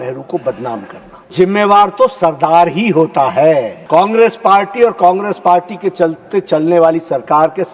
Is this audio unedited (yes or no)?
no